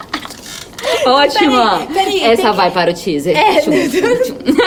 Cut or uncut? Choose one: uncut